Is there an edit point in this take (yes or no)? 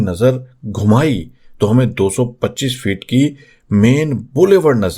no